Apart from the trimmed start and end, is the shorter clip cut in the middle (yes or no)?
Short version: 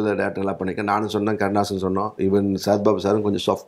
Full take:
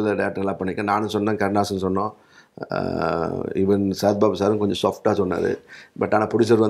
yes